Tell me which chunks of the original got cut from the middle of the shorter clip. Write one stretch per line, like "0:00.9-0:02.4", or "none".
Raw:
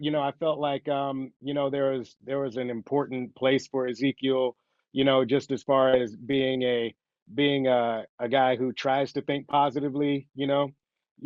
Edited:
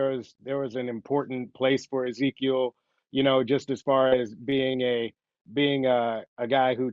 none